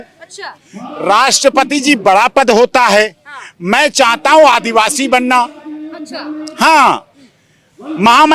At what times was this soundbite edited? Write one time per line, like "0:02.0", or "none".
none